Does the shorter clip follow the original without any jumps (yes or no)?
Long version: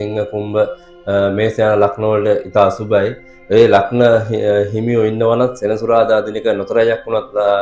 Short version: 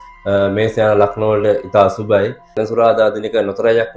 no